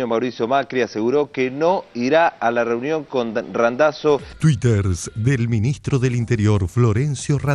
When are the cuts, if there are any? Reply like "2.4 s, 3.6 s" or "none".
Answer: 4.3 s